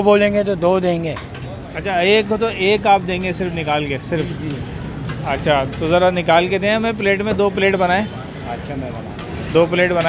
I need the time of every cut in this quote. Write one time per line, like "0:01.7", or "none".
none